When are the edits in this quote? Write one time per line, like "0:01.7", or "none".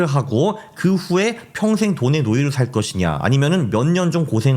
none